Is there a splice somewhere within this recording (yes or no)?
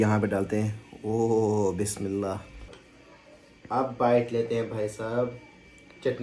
no